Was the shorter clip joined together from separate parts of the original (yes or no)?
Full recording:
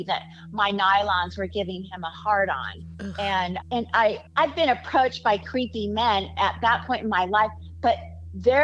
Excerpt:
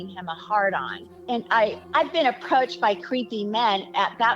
yes